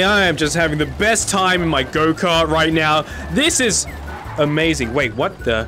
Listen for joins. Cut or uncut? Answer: uncut